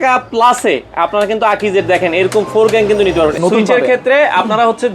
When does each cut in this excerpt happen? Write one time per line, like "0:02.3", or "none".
0:03.4

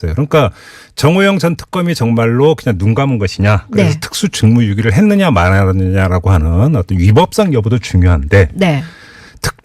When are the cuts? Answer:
0:07.0

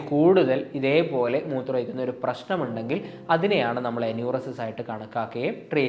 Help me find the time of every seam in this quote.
none

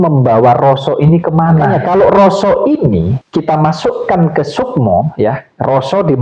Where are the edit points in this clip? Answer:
0:01.8
0:03.2

